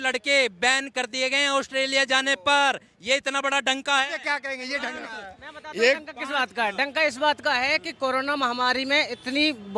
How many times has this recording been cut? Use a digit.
0